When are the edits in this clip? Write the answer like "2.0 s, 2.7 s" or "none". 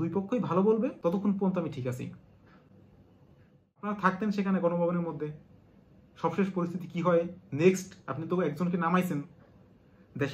1.0 s, 3.9 s

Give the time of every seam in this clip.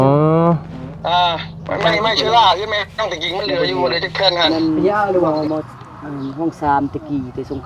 5.3 s

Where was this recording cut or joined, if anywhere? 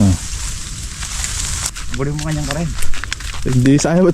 1.7 s

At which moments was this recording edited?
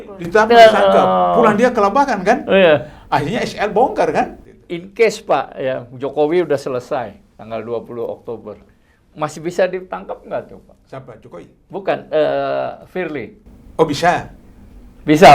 4.4 s

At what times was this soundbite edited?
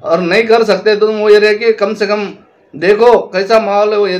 none

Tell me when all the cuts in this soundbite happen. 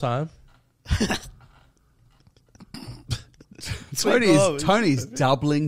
none

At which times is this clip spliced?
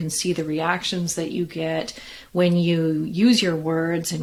none

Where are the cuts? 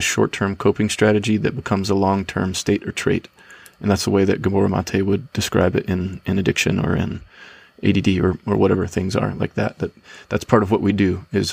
none

